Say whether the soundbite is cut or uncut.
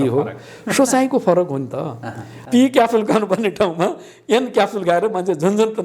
cut